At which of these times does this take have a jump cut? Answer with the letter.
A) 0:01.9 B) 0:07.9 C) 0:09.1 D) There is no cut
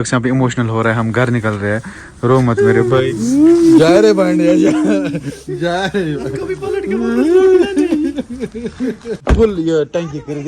C